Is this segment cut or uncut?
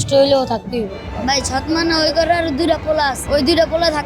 cut